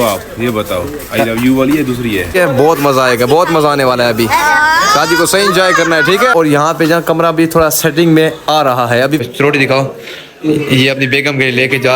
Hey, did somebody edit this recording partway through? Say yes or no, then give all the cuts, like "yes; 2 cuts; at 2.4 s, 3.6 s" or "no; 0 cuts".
yes; 3 cuts; at 2.3 s, 6.3 s, 9.2 s